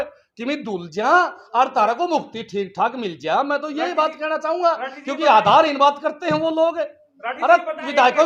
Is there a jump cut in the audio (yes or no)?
no